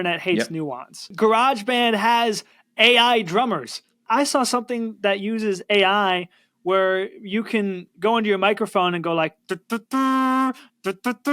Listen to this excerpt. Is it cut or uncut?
cut